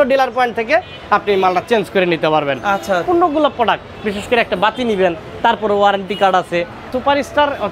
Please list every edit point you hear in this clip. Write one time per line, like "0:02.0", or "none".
0:03.0
0:06.9